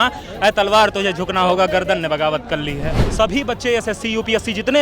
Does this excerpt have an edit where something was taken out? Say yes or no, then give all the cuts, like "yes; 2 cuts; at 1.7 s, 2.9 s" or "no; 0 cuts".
yes; 1 cut; at 3.0 s